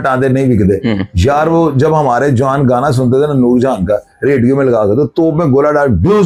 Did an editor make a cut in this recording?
no; 0 cuts

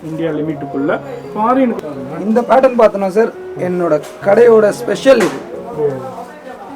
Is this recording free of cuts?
no; 1 cut; at 1.8 s

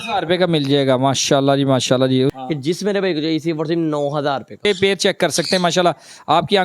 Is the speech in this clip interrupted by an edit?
yes; 2 cuts; at 2.3 s, 4.7 s

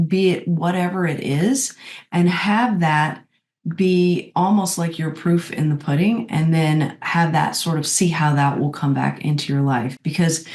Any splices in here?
no; 0 cuts

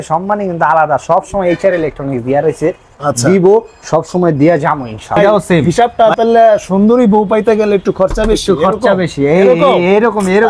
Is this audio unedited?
no; 1 cut; at 5.2 s

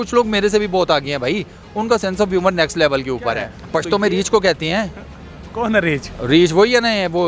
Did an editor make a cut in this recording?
yes; 1 cut; at 3.5 s

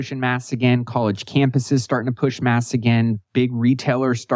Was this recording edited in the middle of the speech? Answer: no; 0 cuts

